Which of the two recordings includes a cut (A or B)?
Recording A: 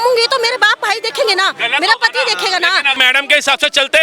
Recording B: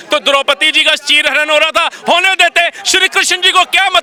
A